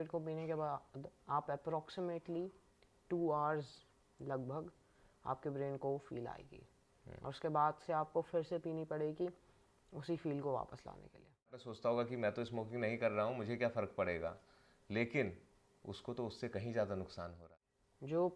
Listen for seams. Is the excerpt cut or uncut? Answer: cut